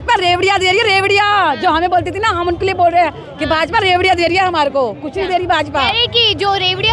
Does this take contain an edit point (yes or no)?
no